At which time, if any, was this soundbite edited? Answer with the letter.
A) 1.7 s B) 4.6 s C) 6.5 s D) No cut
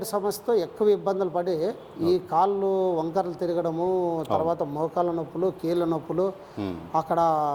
D